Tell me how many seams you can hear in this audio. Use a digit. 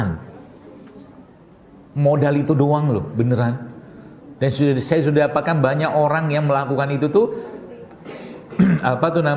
0